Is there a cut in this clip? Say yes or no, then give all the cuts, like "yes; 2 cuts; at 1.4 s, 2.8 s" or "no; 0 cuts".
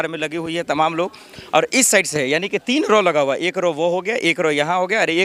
no; 0 cuts